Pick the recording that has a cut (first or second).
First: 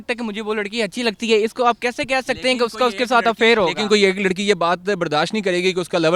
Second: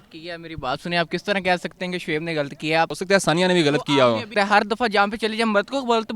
second